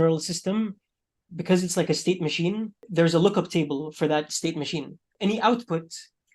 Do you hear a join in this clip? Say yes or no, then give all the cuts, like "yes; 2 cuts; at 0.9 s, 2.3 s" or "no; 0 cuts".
yes; 2 cuts; at 2.8 s, 5.0 s